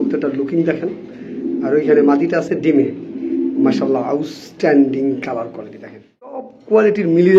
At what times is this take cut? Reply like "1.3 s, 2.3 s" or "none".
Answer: 6.5 s